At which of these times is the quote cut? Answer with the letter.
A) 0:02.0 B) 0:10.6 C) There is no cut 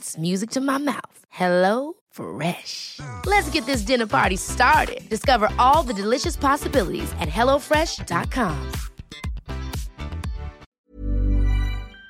B